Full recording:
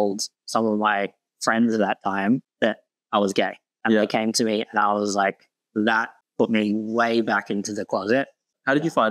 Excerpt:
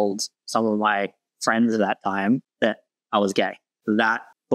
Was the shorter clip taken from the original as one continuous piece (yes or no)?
no